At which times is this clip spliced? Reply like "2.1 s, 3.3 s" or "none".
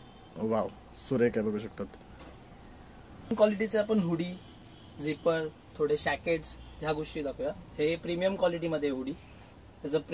3.3 s